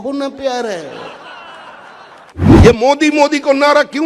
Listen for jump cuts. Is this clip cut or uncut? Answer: cut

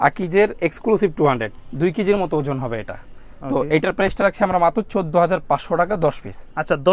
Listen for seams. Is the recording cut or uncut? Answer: uncut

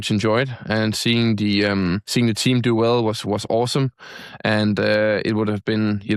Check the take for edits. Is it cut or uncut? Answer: cut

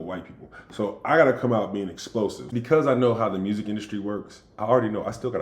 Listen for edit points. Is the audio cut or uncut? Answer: cut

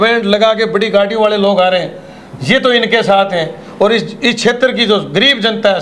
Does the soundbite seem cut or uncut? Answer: uncut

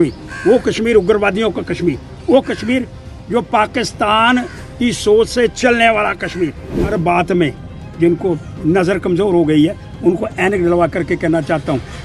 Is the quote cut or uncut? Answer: cut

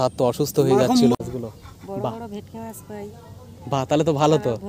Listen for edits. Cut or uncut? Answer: cut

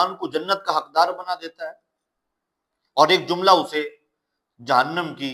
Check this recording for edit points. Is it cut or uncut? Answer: uncut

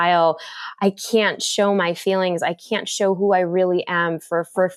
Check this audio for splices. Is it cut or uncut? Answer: uncut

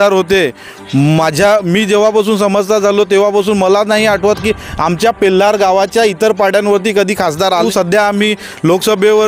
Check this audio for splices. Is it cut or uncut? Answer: cut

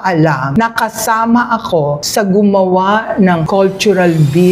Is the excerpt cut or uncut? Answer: uncut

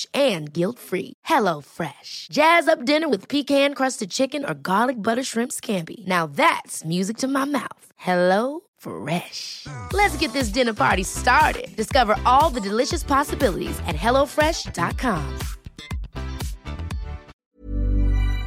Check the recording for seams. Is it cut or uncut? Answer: cut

